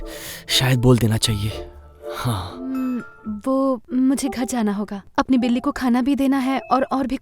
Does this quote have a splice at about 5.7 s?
no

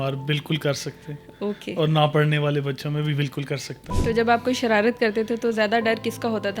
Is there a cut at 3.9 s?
yes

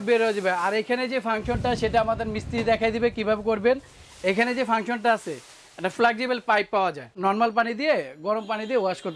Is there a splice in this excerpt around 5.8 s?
no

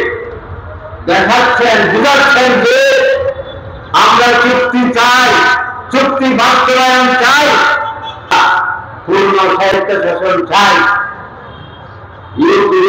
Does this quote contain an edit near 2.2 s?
no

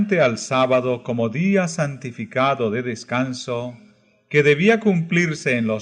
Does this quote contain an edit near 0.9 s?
no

